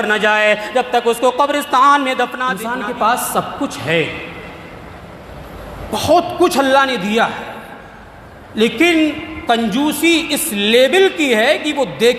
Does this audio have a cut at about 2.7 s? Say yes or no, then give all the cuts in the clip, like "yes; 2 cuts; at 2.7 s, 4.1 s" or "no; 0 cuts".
yes; 1 cut; at 2.7 s